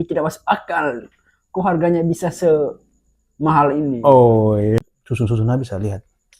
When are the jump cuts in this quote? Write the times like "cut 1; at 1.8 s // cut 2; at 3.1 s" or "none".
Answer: cut 1; at 4.8 s